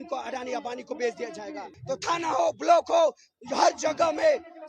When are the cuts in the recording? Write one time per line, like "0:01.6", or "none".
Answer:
0:01.7